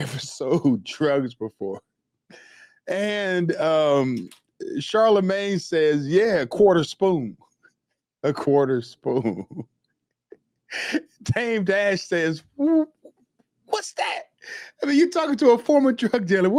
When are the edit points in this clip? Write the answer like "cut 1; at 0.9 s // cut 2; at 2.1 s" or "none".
none